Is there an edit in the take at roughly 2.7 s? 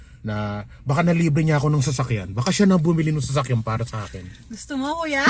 no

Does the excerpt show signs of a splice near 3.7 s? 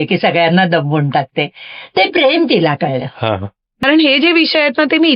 yes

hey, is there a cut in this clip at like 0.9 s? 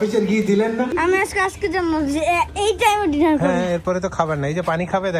yes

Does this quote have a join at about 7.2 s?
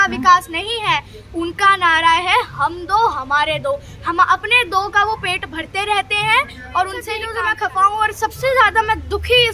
yes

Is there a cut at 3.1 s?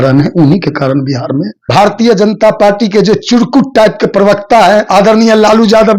no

